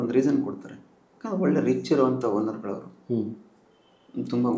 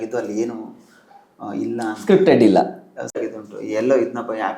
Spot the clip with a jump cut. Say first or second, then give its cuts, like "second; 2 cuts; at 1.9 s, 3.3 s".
second; 1 cut; at 3.2 s